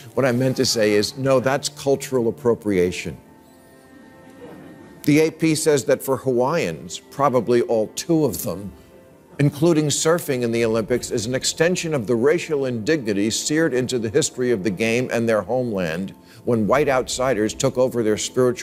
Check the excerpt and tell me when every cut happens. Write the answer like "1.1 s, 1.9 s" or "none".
none